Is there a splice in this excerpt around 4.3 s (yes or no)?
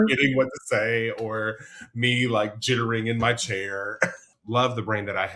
yes